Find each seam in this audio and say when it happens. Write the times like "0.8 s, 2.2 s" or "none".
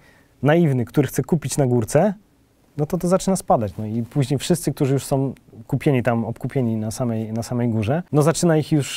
8.1 s

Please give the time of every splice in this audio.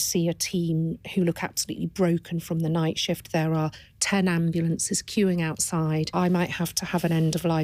6.1 s

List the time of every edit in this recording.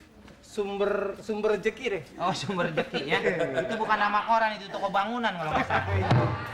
none

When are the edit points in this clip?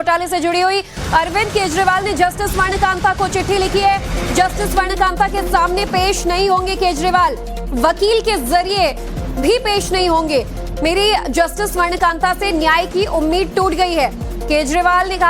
none

